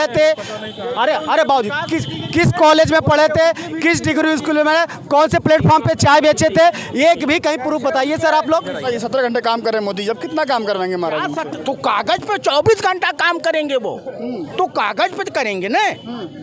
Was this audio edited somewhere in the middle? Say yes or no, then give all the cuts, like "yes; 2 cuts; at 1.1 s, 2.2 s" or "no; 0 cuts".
yes; 1 cut; at 8.8 s